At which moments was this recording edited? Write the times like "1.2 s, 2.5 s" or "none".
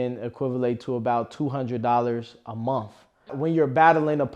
3.3 s